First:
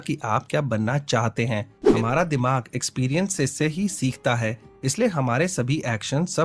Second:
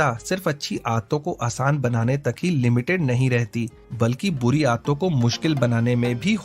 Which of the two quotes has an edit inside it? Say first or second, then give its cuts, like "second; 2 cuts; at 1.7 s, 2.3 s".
first; 1 cut; at 1.8 s